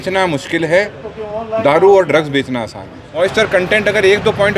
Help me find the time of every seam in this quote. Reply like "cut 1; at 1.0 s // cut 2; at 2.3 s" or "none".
cut 1; at 3.2 s